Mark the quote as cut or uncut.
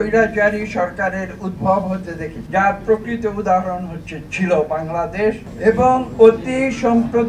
cut